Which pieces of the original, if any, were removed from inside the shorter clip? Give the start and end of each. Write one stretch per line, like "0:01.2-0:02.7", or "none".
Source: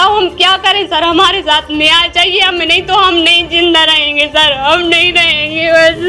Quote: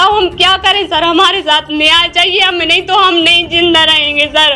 none